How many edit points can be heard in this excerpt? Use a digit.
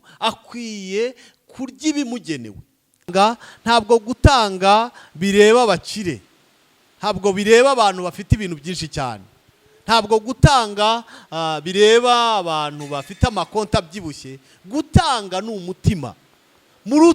1